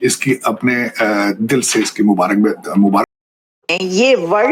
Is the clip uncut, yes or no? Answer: no